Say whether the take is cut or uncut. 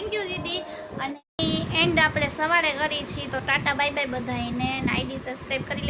cut